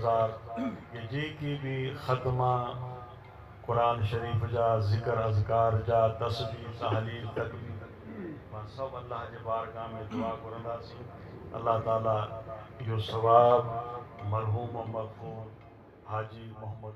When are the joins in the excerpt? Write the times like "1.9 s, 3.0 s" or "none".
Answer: 12.3 s